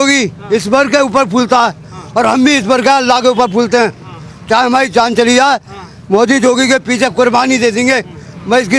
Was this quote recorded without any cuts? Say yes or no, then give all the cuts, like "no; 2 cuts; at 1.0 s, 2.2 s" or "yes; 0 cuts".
yes; 0 cuts